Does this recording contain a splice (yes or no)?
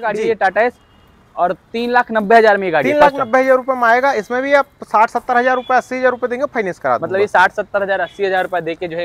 no